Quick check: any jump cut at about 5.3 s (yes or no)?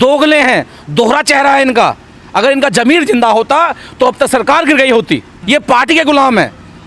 yes